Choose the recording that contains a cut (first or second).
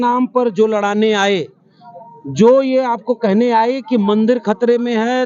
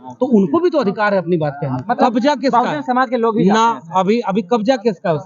second